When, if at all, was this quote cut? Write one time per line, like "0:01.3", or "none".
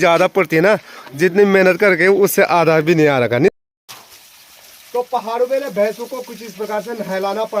0:03.5